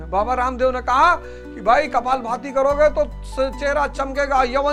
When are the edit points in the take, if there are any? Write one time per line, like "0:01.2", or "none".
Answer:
none